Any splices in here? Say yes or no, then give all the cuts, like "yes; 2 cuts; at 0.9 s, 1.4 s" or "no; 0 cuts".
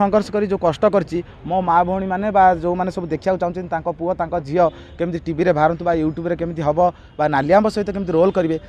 no; 0 cuts